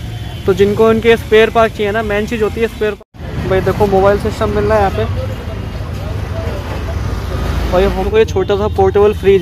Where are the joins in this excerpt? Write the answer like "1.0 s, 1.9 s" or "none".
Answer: 3.0 s, 8.1 s